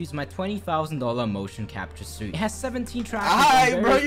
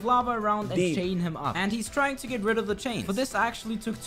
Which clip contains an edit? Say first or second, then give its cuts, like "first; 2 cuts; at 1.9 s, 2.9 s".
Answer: first; 1 cut; at 2.9 s